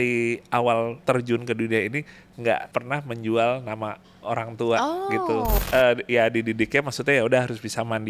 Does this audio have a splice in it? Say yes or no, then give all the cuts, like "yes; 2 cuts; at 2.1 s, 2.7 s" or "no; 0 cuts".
yes; 3 cuts; at 1.0 s, 2.7 s, 5.6 s